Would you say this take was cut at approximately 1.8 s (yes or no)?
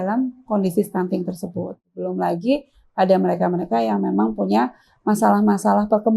yes